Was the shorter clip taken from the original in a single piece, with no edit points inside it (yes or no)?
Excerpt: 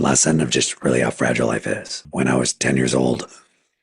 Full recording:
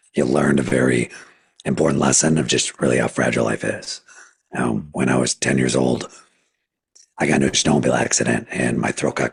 no